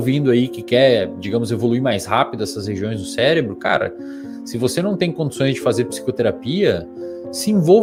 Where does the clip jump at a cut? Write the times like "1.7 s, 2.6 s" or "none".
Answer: none